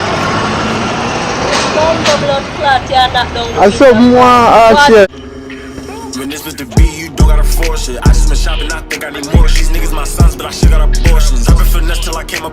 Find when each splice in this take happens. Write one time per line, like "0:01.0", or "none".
0:05.1